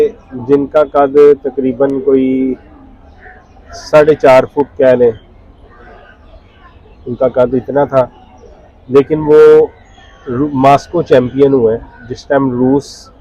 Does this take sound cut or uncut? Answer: uncut